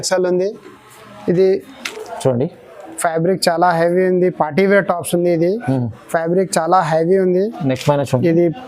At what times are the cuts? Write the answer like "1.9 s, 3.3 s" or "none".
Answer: 1.9 s